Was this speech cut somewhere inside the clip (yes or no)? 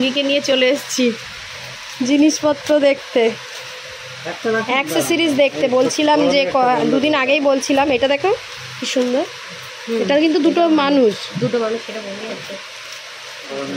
no